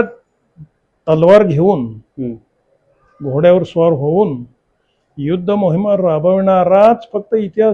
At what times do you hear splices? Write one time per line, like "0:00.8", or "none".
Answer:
none